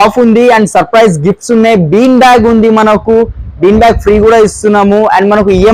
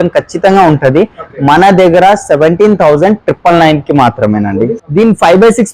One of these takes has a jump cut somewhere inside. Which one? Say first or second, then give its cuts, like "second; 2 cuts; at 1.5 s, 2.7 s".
second; 1 cut; at 4.8 s